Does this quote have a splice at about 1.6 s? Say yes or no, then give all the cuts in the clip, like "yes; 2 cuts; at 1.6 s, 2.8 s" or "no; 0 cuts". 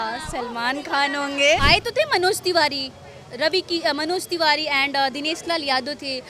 yes; 1 cut; at 1.6 s